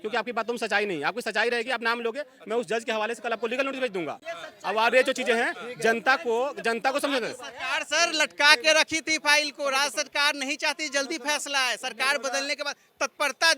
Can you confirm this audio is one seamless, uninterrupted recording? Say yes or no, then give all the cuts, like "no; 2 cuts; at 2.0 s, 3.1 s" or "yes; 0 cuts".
yes; 0 cuts